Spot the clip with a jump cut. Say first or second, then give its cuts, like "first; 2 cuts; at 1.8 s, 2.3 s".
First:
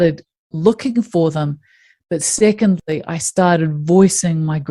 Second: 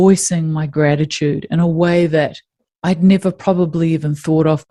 first; 1 cut; at 2.9 s